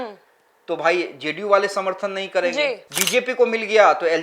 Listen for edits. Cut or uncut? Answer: cut